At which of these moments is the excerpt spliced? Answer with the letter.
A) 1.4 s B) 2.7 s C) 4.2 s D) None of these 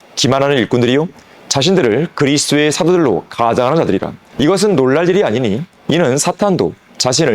C